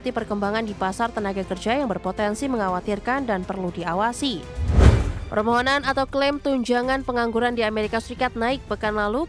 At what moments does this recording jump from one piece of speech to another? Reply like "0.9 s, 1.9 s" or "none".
4.7 s